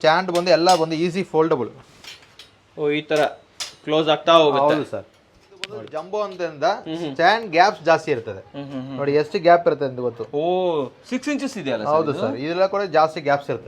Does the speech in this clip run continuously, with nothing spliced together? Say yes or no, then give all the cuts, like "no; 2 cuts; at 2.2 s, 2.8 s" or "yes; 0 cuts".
no; 1 cut; at 5.9 s